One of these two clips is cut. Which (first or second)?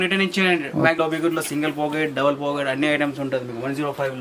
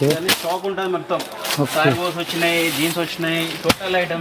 first